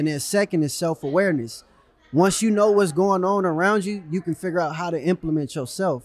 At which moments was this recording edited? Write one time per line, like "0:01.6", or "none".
none